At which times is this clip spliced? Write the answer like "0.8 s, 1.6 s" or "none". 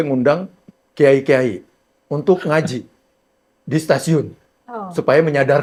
none